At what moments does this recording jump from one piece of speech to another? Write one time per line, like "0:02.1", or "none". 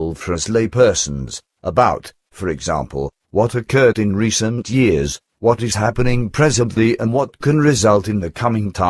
0:03.7